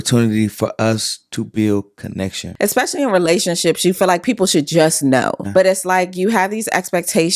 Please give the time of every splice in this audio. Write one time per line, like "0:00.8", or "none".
0:02.4
0:05.4